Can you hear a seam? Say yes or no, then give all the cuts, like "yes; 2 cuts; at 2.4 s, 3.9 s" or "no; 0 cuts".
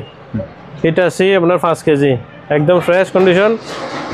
no; 0 cuts